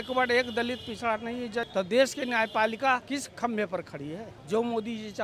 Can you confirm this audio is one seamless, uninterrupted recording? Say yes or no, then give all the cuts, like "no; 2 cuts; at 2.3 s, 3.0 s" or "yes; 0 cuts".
no; 3 cuts; at 1.7 s, 3.0 s, 4.3 s